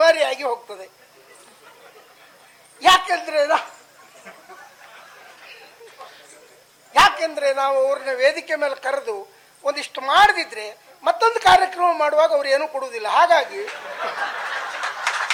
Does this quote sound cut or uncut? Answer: uncut